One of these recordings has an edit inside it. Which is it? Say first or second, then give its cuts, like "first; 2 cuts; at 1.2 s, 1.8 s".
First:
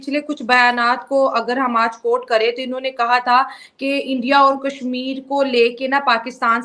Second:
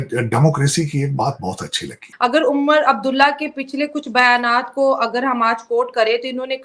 second; 1 cut; at 2.2 s